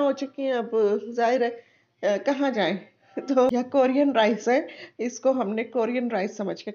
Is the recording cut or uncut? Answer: cut